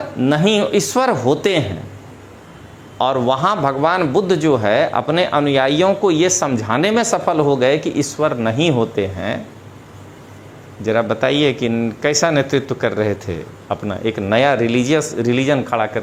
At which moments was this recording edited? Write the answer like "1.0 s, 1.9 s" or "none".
none